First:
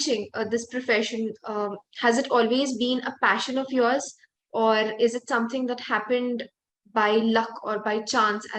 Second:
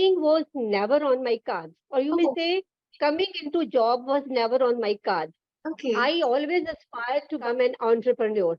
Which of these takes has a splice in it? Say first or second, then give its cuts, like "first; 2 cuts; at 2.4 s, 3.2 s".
second; 1 cut; at 7.4 s